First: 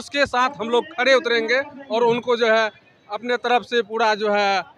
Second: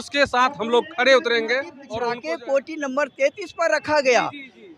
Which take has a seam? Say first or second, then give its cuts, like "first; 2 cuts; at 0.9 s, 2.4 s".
second; 1 cut; at 1.8 s